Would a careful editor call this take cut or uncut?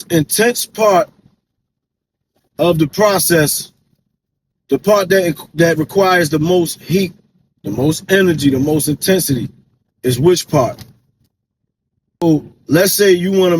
cut